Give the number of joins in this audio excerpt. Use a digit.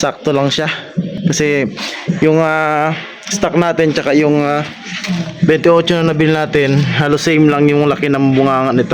1